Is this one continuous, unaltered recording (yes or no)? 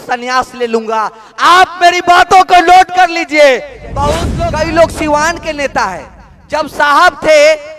no